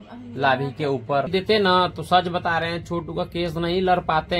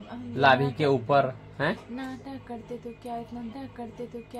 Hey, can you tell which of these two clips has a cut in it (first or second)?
first